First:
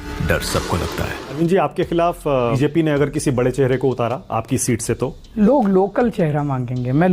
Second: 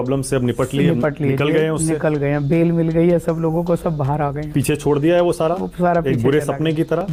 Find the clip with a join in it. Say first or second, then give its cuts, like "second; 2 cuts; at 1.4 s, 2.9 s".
first; 3 cuts; at 1.4 s, 2.6 s, 5.2 s